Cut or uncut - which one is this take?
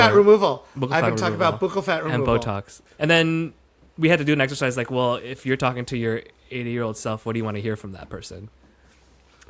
cut